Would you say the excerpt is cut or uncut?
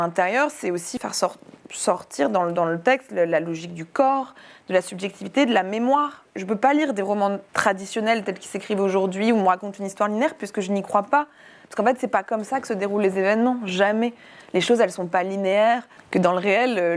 cut